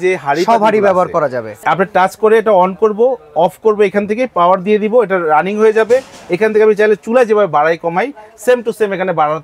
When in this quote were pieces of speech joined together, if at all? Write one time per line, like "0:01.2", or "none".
0:01.5